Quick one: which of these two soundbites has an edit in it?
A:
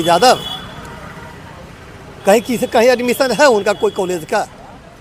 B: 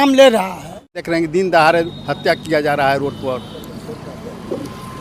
B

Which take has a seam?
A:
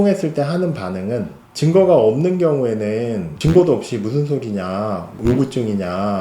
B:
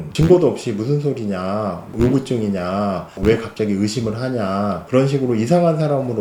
A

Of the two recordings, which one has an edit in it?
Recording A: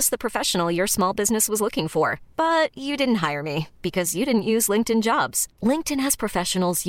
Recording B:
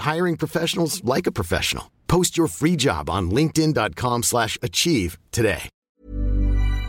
B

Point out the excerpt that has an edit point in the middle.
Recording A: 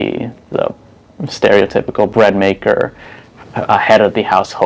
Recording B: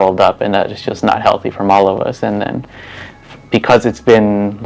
A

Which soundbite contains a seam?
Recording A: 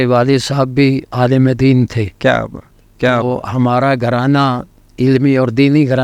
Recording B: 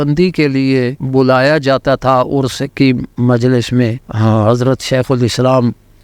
B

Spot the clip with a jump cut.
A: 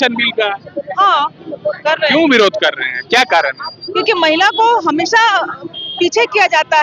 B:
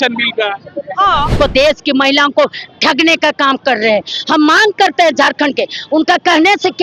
B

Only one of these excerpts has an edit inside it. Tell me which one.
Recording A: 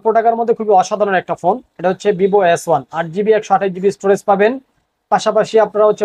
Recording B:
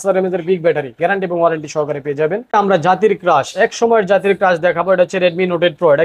B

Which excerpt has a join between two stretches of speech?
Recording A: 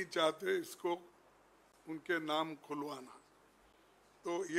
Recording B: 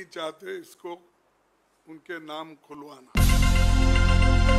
B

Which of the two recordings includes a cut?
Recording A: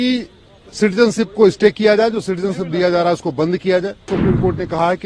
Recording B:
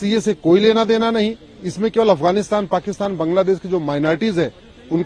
A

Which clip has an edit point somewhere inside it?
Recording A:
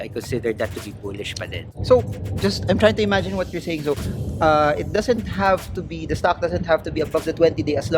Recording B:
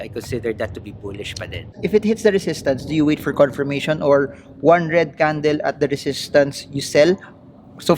B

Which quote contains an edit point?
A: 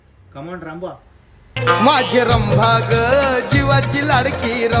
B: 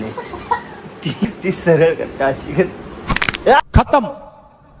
B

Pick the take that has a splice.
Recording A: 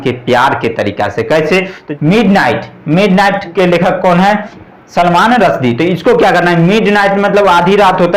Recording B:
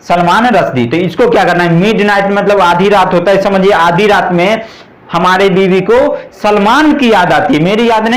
A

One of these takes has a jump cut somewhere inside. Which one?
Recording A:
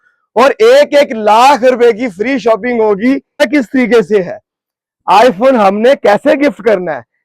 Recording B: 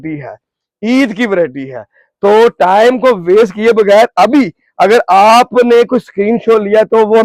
A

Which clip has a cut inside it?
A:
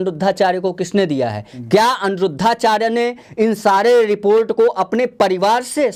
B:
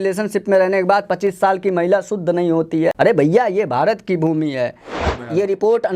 B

